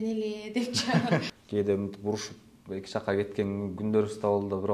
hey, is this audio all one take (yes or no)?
no